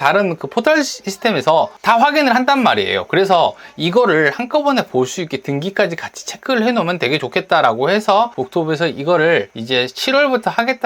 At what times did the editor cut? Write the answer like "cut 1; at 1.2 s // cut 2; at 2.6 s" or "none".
cut 1; at 8.4 s // cut 2; at 9.6 s